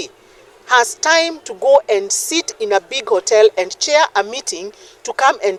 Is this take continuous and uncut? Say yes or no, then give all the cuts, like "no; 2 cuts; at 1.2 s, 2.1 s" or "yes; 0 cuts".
yes; 0 cuts